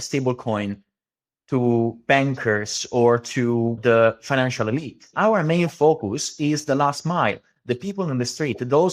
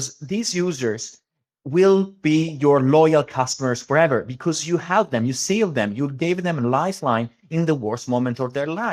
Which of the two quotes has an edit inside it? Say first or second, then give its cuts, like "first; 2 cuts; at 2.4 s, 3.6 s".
first; 2 cuts; at 3.8 s, 5.1 s